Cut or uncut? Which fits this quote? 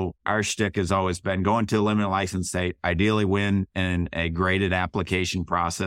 uncut